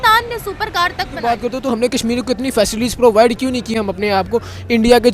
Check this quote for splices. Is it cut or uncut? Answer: cut